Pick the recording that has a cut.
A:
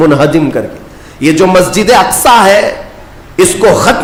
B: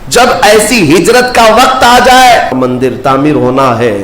B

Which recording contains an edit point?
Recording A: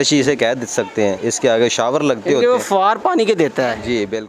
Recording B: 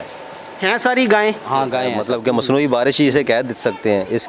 B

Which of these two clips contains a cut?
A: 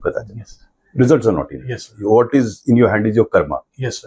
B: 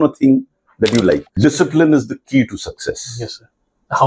B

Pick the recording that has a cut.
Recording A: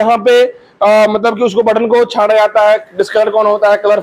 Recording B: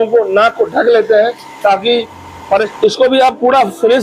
B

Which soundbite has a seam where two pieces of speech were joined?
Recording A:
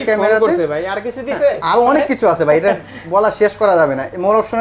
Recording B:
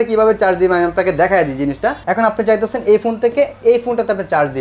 B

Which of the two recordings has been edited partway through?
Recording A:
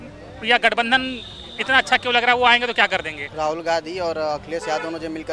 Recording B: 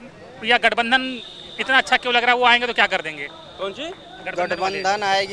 A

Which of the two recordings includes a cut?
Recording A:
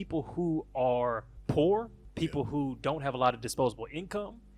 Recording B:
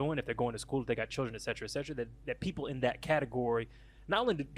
A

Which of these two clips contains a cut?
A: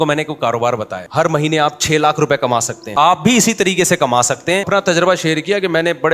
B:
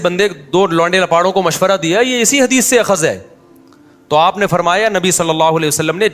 A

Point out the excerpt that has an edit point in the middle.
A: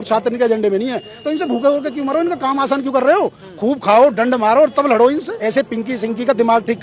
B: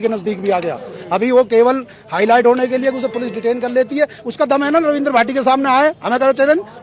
A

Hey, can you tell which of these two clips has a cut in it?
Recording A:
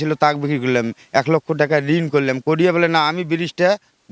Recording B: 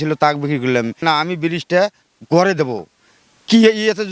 B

